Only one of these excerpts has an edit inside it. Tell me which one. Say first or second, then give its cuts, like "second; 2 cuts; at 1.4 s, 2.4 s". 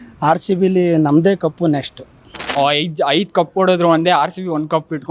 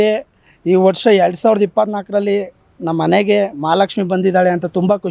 first; 1 cut; at 2.4 s